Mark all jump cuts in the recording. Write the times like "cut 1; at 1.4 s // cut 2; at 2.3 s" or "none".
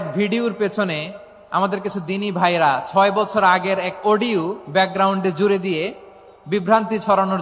none